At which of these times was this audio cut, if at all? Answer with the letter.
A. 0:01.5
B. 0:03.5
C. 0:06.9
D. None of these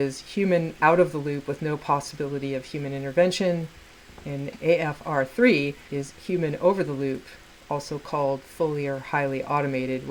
D